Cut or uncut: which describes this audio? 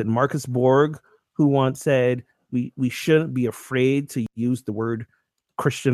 cut